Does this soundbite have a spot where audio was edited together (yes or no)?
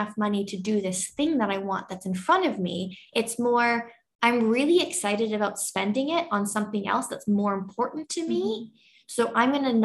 no